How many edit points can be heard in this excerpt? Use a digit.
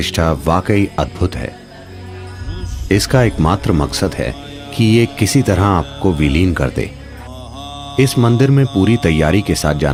0